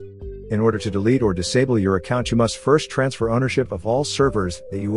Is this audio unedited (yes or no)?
yes